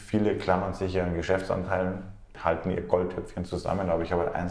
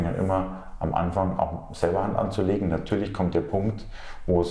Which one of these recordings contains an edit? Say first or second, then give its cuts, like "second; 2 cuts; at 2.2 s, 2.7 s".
first; 1 cut; at 2.3 s